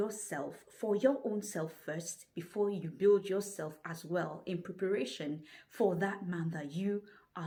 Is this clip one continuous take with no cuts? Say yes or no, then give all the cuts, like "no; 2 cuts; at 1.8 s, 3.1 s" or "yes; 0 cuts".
yes; 0 cuts